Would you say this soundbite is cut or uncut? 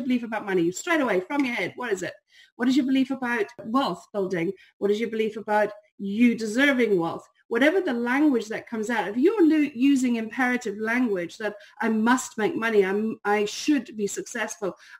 cut